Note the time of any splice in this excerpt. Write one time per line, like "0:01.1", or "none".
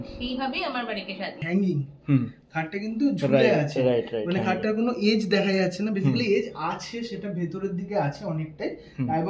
0:01.4